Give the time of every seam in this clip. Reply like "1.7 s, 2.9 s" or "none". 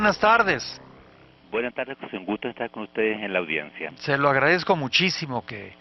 4.7 s